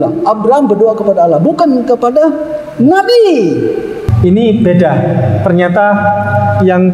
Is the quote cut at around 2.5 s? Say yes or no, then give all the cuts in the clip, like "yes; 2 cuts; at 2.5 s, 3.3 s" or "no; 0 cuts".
no; 1 cut; at 4.0 s